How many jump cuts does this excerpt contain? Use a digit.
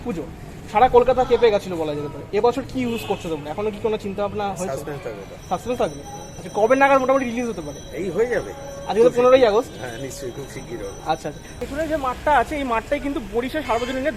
1